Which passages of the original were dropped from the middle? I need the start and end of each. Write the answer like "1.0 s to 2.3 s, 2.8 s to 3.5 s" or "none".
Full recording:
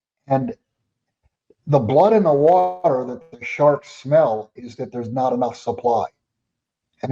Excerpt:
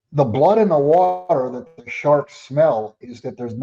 none